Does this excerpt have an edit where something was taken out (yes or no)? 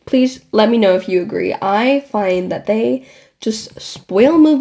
no